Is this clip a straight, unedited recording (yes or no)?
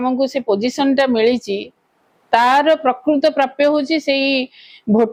yes